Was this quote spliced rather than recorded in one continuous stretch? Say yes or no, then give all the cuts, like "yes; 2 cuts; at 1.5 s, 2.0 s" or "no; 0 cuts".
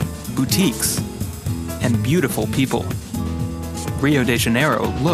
yes; 1 cut; at 2.7 s